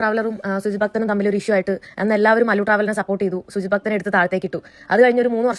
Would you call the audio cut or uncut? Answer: uncut